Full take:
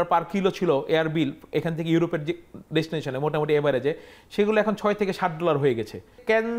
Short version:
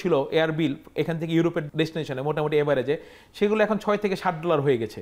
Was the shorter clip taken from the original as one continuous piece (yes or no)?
no